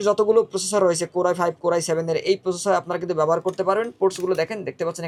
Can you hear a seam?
no; 0 cuts

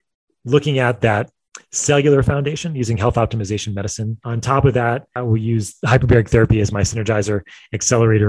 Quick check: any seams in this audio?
yes; 2 cuts; at 4.3 s, 5.1 s

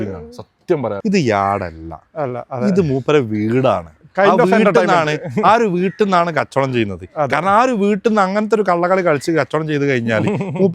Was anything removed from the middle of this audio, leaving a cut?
yes; 1 cut; at 1.0 s

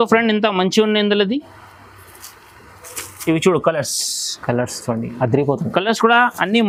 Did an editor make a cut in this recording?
no; 0 cuts

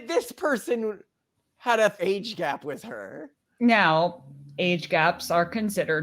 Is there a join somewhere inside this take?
yes; 1 cut; at 2.0 s

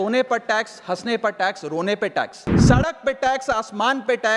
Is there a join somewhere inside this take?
yes; 1 cut; at 2.5 s

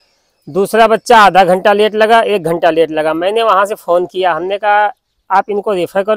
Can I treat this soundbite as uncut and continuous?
yes; 0 cuts

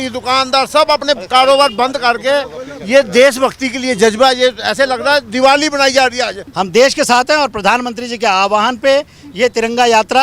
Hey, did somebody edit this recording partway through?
yes; 1 cut; at 6.4 s

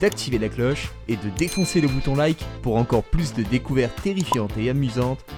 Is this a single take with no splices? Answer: yes; 0 cuts

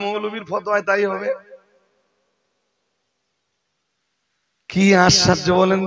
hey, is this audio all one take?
yes; 0 cuts

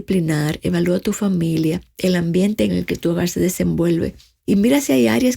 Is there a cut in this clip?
yes; 2 cuts; at 2.7 s, 4.3 s

